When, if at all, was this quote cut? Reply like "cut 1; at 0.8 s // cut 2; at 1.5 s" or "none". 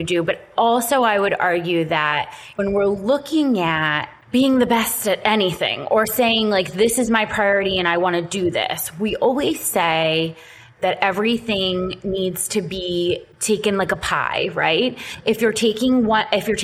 cut 1; at 13.3 s

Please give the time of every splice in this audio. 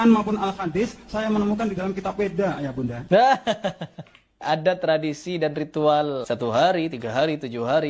cut 1; at 3.0 s // cut 2; at 4.4 s // cut 3; at 6.2 s

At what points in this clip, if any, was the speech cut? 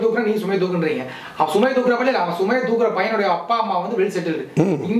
none

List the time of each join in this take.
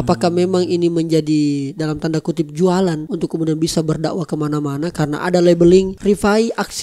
cut 1; at 3.1 s

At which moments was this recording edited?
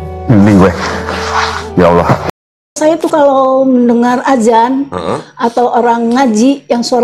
cut 1; at 2.6 s

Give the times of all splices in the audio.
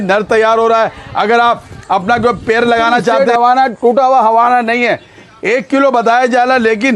cut 1; at 3.2 s

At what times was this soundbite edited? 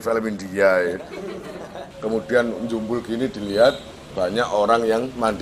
cut 1; at 1.9 s

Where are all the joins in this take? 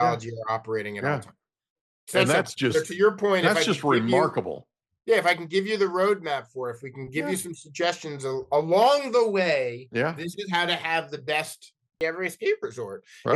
cut 1; at 12.0 s

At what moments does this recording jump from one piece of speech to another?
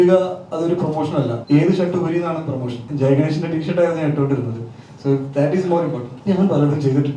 cut 1; at 1.4 s // cut 2; at 2.8 s // cut 3; at 6.1 s

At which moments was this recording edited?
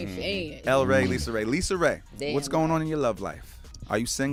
none

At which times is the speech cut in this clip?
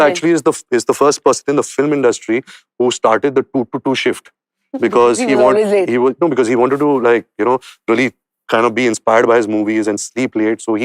none

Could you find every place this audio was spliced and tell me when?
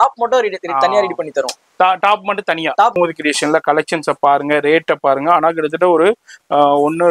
cut 1; at 3.0 s

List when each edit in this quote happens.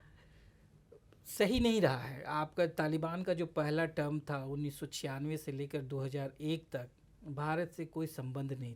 none

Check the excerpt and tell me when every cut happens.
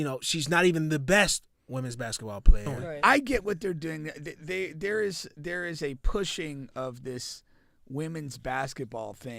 cut 1; at 2.8 s

